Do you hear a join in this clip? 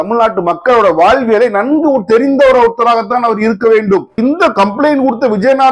yes; 1 cut; at 4.2 s

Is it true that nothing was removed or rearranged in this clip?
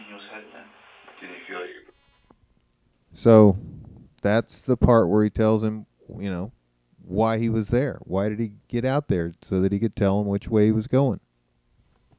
yes; 0 cuts

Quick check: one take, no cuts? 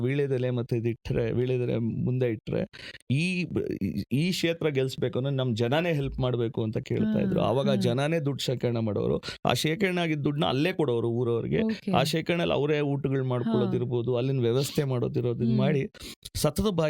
yes; 0 cuts

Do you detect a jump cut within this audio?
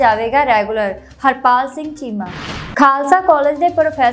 yes; 1 cut; at 2.5 s

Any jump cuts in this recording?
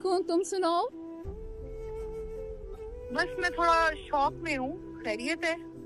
yes; 2 cuts; at 1.5 s, 3.1 s

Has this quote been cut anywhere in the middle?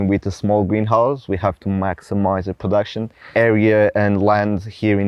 no; 0 cuts

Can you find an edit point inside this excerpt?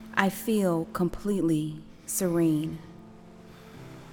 no; 0 cuts

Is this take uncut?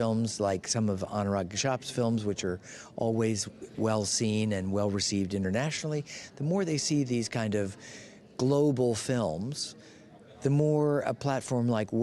yes; 0 cuts

